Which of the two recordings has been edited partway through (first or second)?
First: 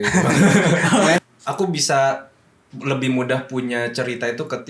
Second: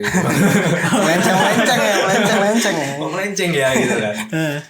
first